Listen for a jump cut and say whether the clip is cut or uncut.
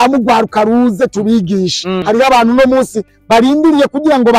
cut